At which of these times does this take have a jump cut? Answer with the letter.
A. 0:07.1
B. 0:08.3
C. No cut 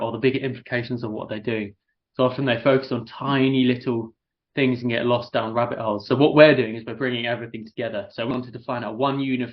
B